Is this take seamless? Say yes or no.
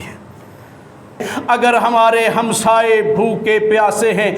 no